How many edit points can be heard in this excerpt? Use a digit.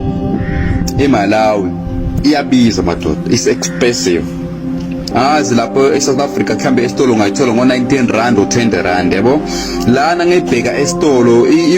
1